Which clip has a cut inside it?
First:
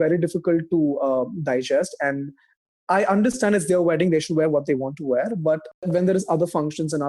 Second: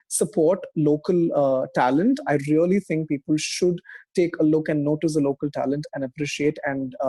first; 1 cut; at 5.8 s

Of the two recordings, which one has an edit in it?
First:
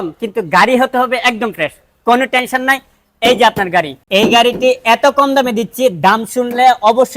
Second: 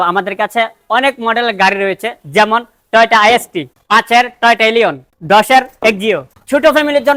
first; 1 cut; at 4.0 s

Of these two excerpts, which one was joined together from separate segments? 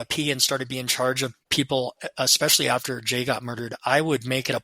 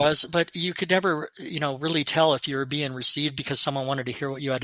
first; 1 cut; at 1.4 s

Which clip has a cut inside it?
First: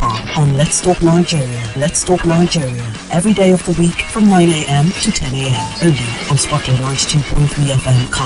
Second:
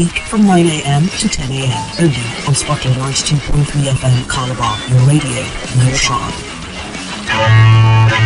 second; 1 cut; at 7.3 s

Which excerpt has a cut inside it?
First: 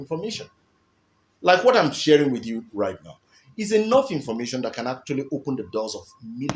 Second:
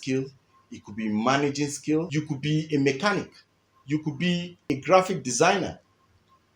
second; 2 cuts; at 2.1 s, 4.7 s

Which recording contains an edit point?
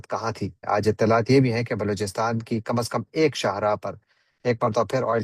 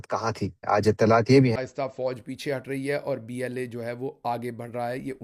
second; 1 cut; at 1.5 s

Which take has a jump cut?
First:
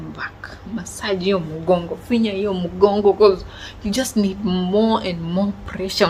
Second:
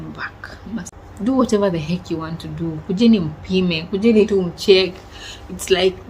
second; 1 cut; at 0.9 s

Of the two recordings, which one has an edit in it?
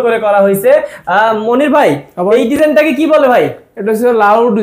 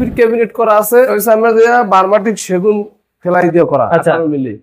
second; 1 cut; at 1.2 s

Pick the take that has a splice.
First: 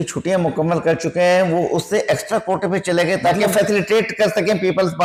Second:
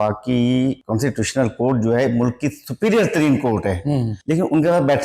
second; 2 cuts; at 0.8 s, 4.1 s

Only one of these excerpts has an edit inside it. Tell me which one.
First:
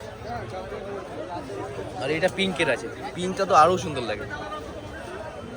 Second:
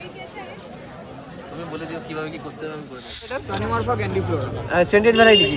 second; 1 cut; at 3.4 s

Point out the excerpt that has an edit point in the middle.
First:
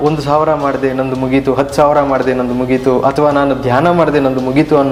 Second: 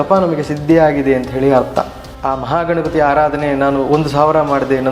second; 1 cut; at 2.0 s

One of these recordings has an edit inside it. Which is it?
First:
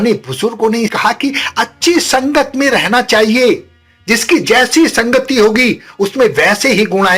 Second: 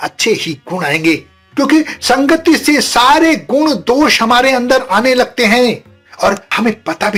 first; 1 cut; at 0.9 s

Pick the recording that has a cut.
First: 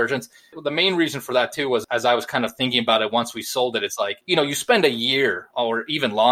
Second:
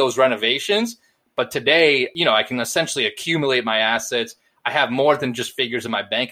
first; 2 cuts; at 4.2 s, 5.4 s

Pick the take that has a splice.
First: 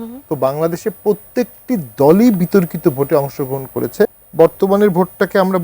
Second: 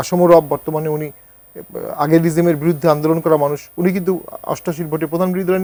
first; 1 cut; at 4.2 s

